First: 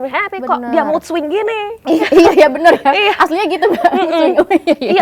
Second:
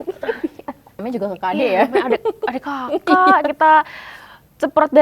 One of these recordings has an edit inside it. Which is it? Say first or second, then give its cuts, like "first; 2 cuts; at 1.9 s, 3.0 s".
second; 1 cut; at 1.0 s